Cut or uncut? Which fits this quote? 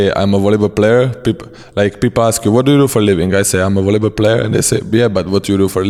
uncut